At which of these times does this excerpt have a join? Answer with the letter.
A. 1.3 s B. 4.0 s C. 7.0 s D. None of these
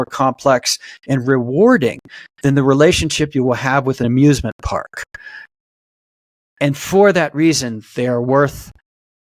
B